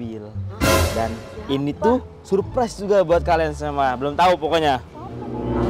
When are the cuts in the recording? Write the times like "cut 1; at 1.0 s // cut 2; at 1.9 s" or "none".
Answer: none